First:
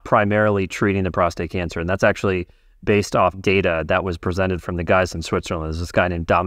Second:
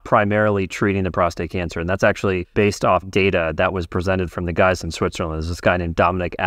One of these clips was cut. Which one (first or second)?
second